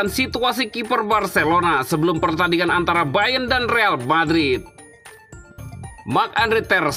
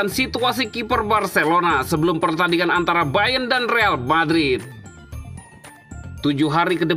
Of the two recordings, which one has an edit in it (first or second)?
first